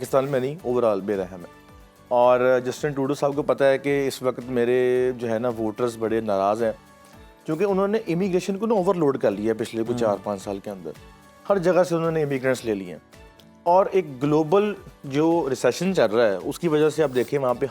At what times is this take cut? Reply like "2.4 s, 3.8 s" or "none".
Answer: none